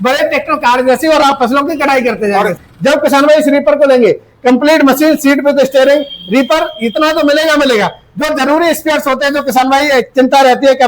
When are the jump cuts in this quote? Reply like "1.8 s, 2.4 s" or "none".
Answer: 2.6 s